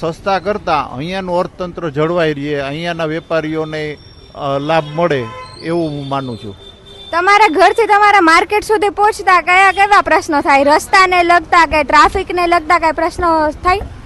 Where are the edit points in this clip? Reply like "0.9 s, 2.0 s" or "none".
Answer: none